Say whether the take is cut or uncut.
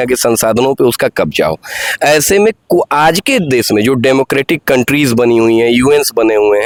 uncut